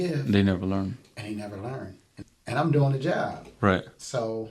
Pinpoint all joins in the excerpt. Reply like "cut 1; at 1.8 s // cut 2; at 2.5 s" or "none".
cut 1; at 2.1 s